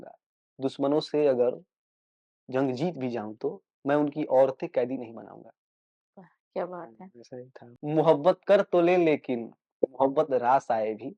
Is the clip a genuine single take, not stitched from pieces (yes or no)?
no